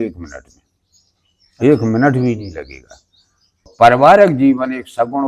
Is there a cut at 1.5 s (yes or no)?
no